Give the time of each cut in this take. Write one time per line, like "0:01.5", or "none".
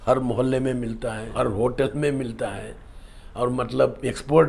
0:01.2